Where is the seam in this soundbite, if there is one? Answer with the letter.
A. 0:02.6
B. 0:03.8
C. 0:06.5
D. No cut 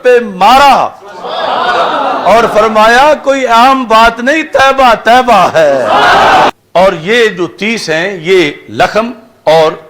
C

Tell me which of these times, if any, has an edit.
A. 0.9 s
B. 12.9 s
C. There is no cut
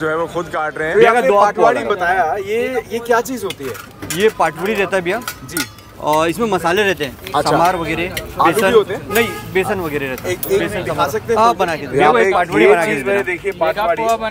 A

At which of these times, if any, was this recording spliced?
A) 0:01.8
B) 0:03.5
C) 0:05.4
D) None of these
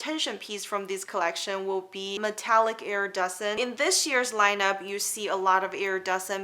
B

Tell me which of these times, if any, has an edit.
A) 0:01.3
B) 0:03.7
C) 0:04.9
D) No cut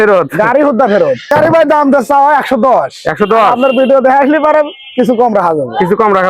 A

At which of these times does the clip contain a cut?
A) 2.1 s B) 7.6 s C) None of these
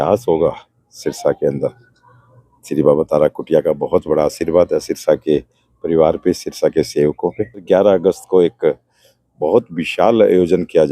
B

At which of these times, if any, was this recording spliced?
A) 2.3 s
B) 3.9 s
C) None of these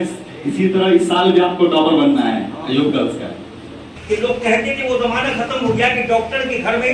B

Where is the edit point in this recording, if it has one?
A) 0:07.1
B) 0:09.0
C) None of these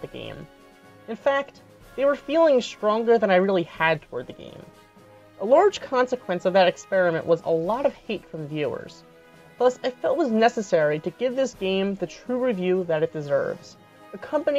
C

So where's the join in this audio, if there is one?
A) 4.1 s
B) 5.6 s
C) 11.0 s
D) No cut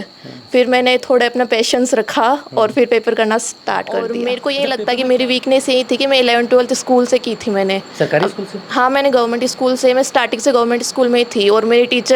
A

